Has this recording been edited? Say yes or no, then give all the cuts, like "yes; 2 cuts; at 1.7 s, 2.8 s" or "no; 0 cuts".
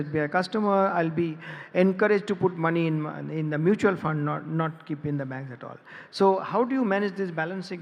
no; 0 cuts